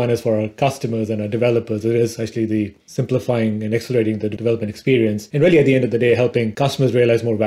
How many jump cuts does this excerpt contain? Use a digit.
3